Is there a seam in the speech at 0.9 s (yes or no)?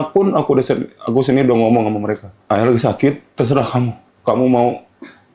no